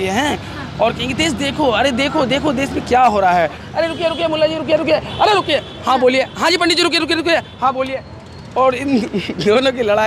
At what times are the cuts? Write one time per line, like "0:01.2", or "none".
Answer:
0:03.7